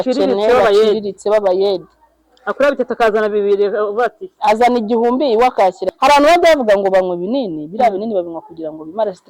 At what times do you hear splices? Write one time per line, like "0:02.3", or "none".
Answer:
0:05.9